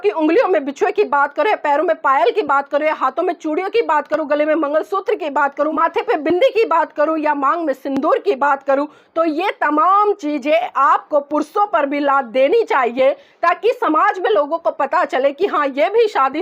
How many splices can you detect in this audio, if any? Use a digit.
1